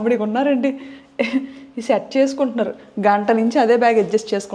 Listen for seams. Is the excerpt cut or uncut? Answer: uncut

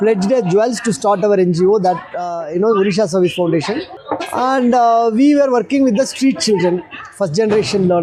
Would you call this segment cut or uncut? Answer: uncut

